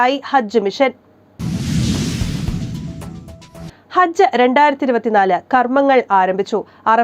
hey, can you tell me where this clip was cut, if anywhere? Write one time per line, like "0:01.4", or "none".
0:01.3
0:03.7